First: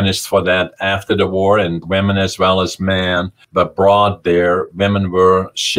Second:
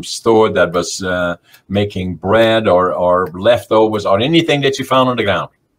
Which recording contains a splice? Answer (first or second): first